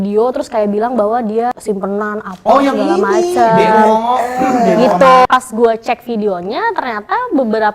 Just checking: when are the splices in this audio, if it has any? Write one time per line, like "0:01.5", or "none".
0:01.5
0:05.2